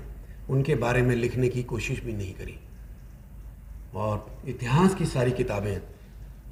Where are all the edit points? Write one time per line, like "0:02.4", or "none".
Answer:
none